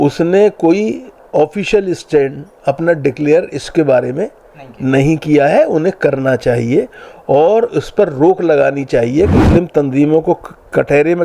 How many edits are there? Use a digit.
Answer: 1